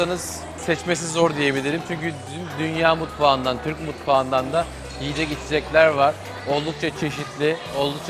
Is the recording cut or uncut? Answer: uncut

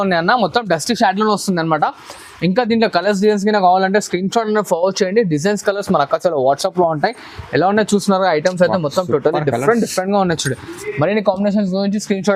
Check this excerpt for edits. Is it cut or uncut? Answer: uncut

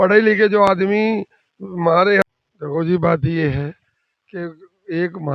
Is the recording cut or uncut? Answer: cut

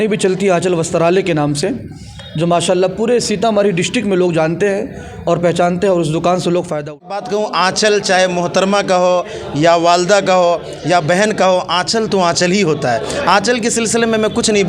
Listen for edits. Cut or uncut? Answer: cut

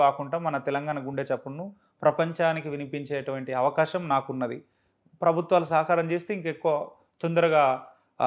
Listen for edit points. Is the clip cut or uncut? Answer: uncut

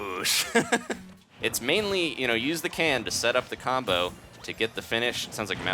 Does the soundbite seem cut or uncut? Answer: cut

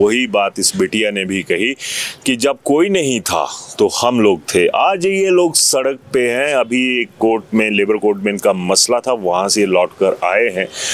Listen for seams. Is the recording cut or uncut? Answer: uncut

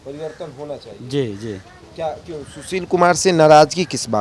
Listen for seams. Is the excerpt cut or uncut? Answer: uncut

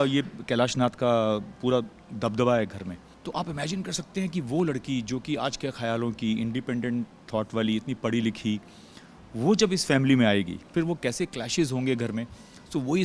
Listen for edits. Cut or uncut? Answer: cut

